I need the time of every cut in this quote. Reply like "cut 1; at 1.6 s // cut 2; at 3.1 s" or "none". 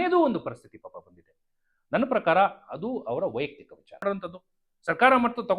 cut 1; at 4.0 s